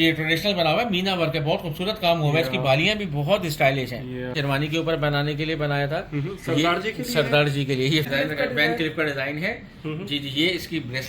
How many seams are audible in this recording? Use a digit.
2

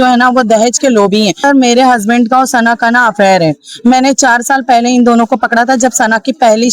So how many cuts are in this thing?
1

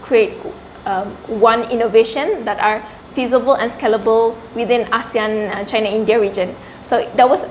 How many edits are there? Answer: 0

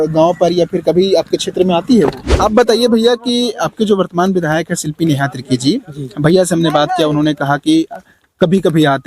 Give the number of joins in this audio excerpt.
1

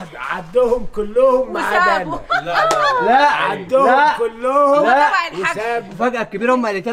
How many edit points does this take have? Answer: 1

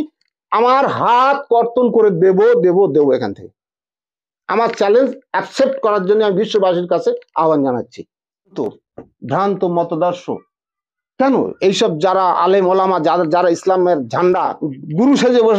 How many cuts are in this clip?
2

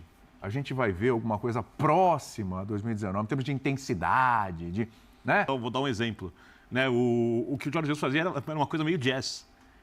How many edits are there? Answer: 1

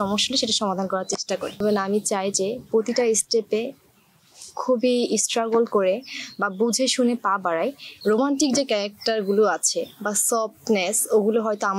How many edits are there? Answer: 2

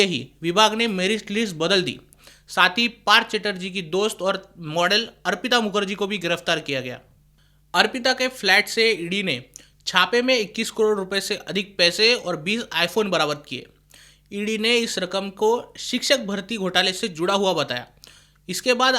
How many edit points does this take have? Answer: 1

